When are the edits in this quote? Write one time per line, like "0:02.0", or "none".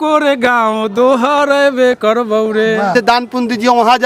0:02.9